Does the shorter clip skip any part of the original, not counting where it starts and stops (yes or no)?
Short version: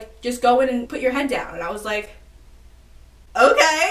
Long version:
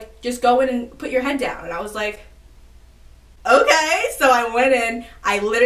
yes